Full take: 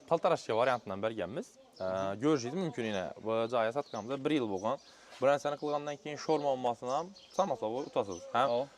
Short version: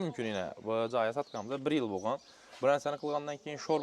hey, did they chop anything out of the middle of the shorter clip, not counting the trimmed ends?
no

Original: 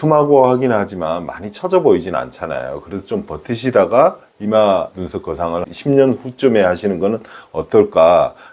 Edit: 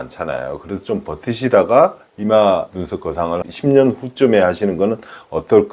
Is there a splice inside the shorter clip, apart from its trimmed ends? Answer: no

